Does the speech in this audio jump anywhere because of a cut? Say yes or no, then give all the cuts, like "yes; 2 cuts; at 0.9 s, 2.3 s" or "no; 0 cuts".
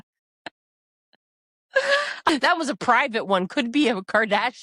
yes; 1 cut; at 2.3 s